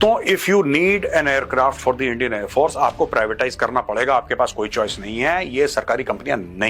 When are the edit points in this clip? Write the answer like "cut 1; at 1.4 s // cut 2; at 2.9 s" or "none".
none